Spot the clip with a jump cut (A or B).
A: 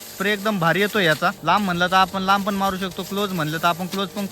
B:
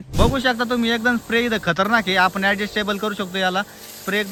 A